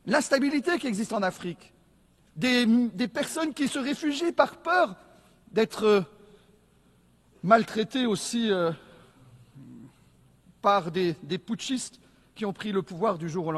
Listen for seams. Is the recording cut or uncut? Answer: uncut